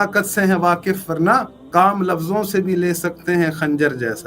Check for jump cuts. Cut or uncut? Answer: cut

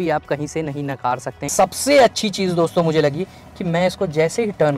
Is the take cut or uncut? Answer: cut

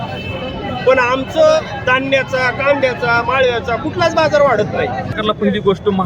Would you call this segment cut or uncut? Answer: cut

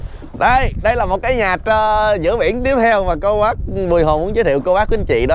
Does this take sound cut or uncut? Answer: uncut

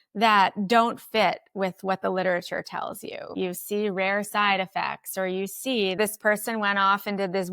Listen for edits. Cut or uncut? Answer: cut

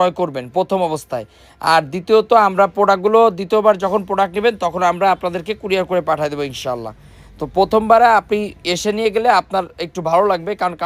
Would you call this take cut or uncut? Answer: uncut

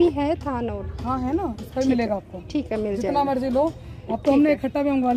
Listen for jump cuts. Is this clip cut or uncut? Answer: uncut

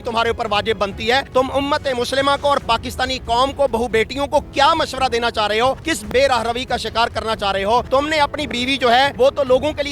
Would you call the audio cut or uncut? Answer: uncut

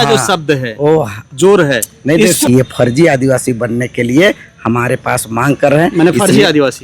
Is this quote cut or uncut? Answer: cut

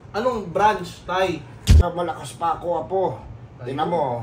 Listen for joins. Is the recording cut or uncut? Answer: cut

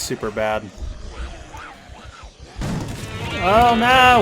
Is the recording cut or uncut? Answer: cut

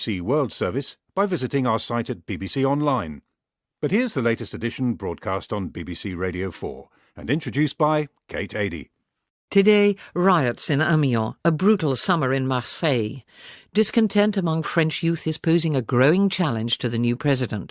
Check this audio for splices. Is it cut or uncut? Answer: uncut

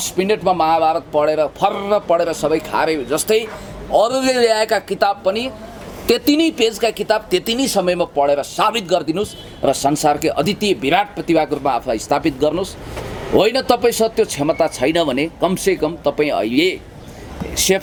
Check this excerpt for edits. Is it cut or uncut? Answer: uncut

